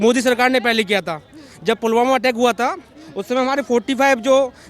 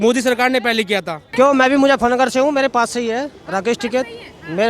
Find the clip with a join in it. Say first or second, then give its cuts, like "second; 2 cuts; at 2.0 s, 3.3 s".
second; 1 cut; at 1.2 s